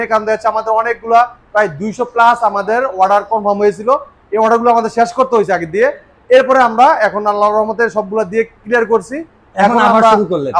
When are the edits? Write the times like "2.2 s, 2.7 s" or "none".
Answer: none